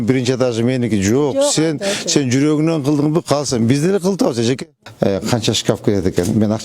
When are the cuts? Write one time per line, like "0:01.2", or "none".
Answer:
0:04.8